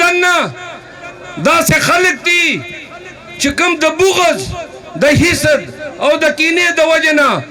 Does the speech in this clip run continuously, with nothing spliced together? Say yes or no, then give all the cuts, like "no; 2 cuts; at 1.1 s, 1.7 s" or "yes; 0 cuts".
yes; 0 cuts